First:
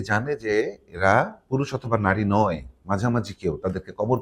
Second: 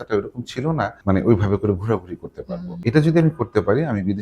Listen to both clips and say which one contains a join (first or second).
second